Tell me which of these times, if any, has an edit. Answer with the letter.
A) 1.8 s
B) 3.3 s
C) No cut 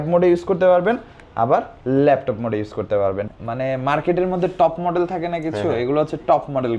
B